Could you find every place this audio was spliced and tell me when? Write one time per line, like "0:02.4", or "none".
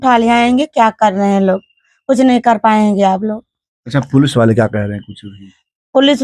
none

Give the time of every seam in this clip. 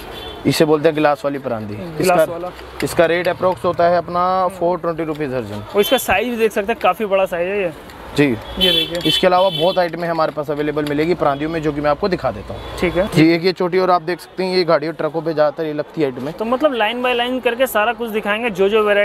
none

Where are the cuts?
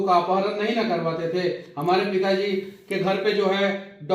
none

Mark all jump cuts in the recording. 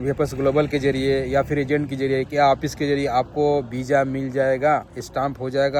none

